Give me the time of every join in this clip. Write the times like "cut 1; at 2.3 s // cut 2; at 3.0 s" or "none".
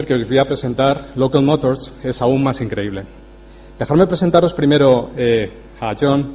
none